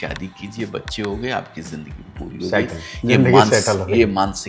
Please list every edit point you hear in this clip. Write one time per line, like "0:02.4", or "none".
none